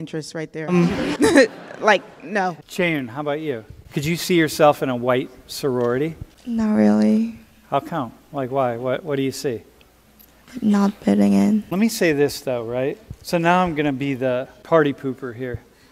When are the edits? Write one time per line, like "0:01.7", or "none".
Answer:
0:00.7
0:02.6
0:06.3
0:10.3
0:11.7
0:14.5